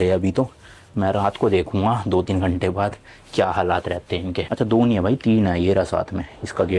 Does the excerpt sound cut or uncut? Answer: uncut